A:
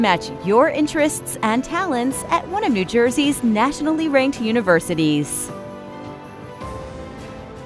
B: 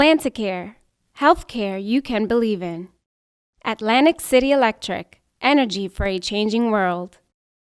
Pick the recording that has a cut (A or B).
A